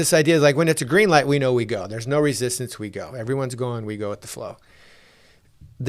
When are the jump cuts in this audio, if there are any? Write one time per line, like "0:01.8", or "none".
none